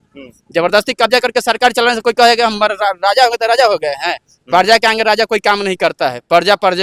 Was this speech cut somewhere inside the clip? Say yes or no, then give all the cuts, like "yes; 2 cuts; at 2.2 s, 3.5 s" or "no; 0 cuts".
no; 0 cuts